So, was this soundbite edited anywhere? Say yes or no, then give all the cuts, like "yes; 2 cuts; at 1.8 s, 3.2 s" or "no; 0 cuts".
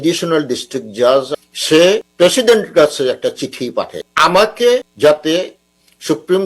yes; 3 cuts; at 1.6 s, 4.1 s, 4.9 s